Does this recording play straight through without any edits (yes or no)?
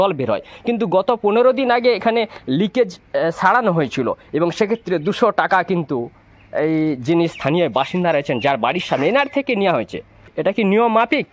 no